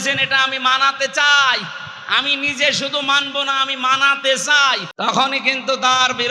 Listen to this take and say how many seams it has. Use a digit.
1